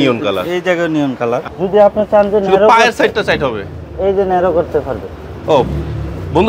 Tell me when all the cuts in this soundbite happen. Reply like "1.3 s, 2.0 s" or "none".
1.5 s